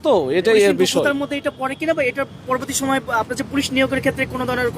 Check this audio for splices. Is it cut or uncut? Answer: uncut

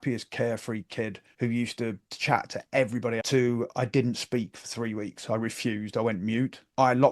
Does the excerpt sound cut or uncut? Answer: cut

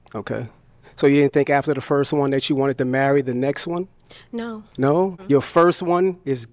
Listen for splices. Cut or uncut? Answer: cut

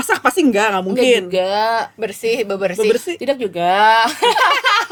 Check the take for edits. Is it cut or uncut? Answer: uncut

